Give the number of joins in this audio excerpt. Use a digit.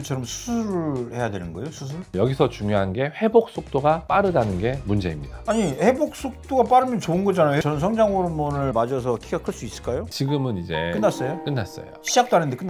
2